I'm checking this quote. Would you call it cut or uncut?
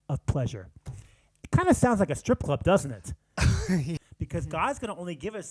cut